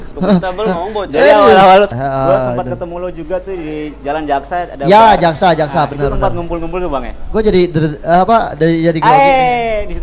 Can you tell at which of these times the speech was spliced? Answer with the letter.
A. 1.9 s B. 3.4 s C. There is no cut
A